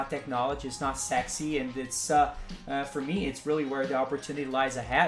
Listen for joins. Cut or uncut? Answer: uncut